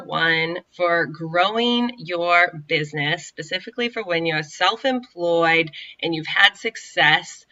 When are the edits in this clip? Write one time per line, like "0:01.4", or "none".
none

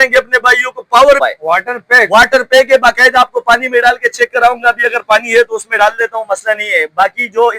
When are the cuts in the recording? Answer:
0:01.2

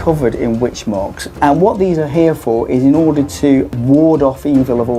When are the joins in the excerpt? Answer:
0:03.7

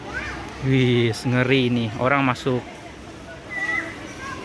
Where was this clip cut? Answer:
none

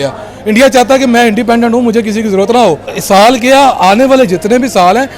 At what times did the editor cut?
0:03.0

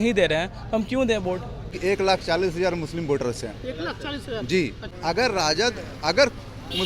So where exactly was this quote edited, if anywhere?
0:01.7
0:04.9

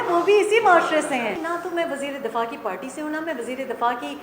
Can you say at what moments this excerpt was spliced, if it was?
0:01.4

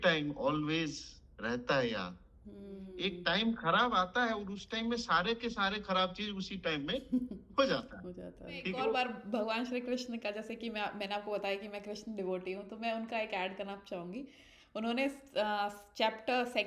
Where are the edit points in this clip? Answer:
0:02.9
0:08.7

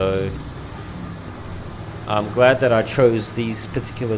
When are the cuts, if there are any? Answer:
none

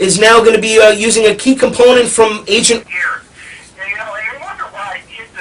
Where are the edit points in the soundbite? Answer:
none

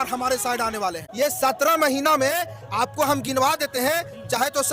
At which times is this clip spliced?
0:01.0

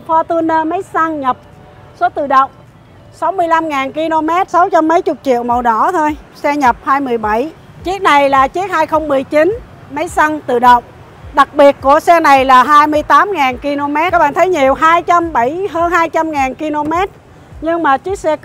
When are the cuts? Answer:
0:04.5
0:07.7
0:14.1

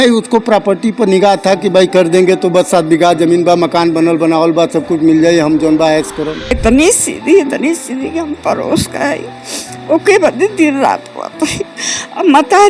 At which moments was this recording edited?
0:06.4

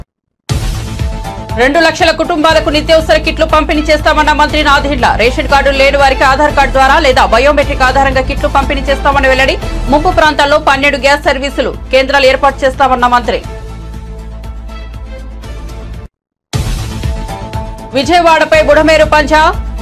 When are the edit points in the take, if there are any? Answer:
none

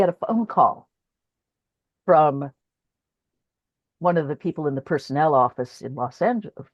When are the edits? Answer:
none

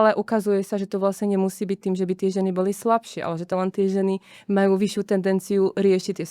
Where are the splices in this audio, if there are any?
0:03.5

